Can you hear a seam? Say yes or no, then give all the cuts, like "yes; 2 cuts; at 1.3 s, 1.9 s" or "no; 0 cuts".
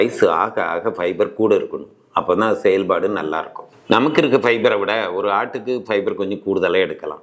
no; 0 cuts